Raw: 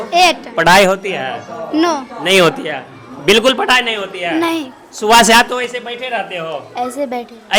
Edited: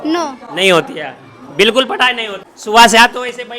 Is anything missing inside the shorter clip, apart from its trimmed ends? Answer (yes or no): yes